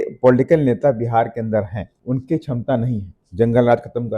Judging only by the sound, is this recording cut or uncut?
cut